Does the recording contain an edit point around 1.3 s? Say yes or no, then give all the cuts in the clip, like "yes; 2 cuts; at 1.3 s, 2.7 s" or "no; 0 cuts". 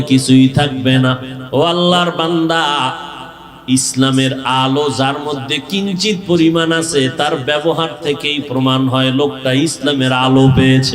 yes; 1 cut; at 1.3 s